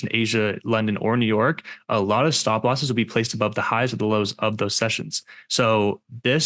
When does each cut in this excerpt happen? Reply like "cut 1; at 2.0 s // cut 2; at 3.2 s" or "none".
none